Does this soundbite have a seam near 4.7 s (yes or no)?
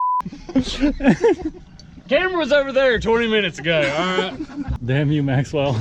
yes